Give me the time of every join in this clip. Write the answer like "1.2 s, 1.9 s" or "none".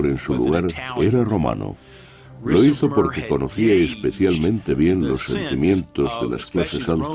none